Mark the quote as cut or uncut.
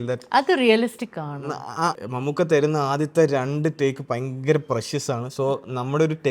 cut